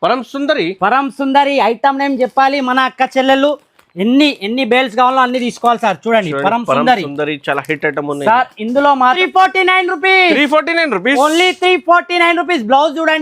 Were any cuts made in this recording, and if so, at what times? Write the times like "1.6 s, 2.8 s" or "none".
9.2 s